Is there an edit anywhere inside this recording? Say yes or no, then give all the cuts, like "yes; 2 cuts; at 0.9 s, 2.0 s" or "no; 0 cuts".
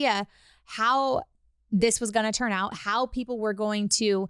no; 0 cuts